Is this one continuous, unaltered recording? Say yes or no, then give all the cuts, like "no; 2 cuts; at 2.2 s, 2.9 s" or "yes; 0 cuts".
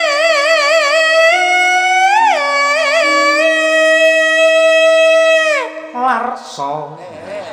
yes; 0 cuts